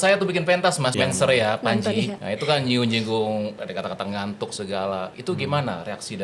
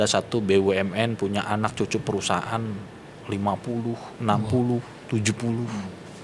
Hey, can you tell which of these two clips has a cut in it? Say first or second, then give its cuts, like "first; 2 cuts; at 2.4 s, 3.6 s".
first; 4 cuts; at 0.9 s, 2.2 s, 3.6 s, 5.1 s